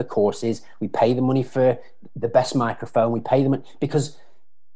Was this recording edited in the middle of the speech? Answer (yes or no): no